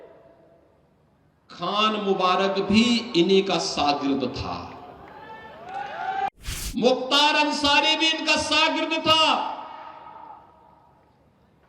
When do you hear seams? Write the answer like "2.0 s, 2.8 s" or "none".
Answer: 6.3 s